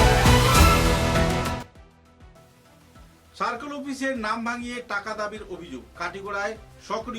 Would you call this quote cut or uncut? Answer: cut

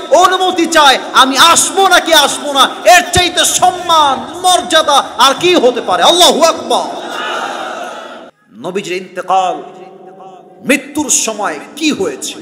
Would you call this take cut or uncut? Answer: cut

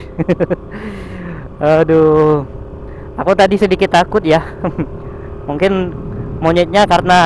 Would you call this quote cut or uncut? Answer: uncut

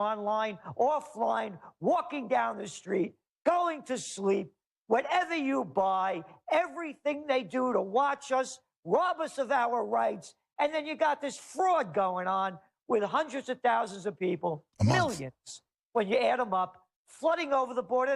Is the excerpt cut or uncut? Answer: cut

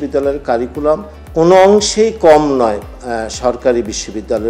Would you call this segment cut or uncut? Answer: cut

